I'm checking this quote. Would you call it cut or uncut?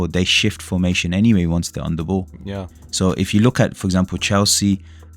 cut